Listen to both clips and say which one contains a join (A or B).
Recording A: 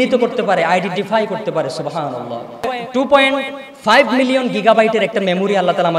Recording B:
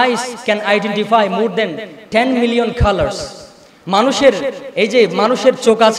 A